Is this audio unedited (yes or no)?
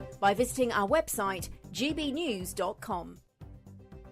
no